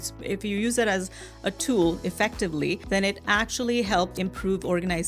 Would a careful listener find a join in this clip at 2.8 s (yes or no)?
yes